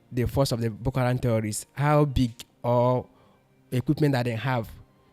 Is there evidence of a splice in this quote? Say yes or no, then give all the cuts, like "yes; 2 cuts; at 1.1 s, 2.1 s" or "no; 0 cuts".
no; 0 cuts